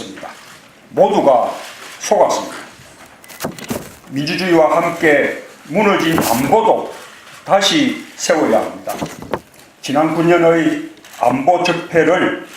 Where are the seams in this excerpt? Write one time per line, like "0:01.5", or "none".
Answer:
0:11.1